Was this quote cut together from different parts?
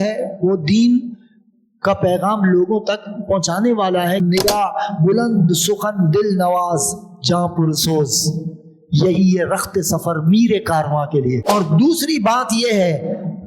yes; 2 cuts; at 4.2 s, 11.4 s

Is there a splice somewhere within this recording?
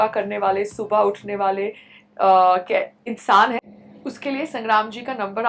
yes; 1 cut; at 3.6 s

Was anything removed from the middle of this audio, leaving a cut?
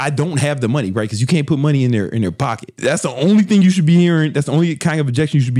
no; 0 cuts

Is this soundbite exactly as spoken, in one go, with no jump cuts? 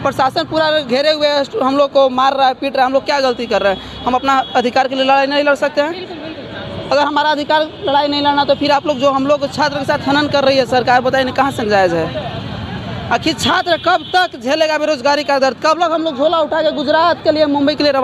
yes; 0 cuts

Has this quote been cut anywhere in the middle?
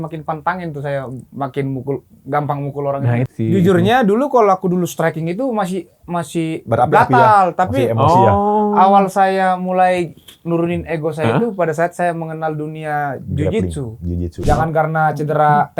yes; 2 cuts; at 3.3 s, 14.4 s

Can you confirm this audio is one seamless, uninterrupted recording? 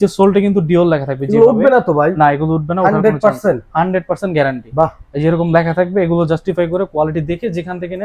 yes; 0 cuts

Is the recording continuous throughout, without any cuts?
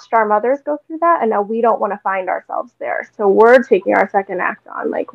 yes; 0 cuts

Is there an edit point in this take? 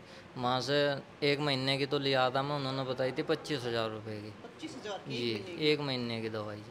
no; 0 cuts

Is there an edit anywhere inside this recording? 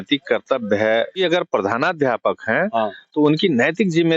yes; 1 cut; at 1.2 s

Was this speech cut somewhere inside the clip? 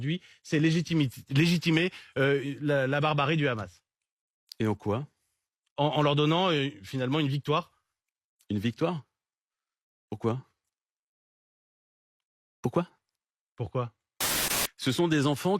yes; 1 cut; at 14.4 s

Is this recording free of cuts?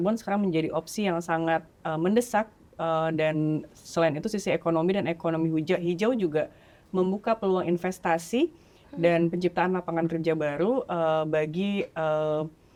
yes; 0 cuts

